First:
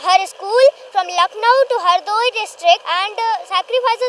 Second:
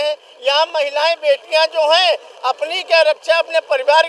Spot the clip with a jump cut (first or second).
first